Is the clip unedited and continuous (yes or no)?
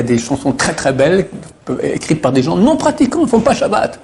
yes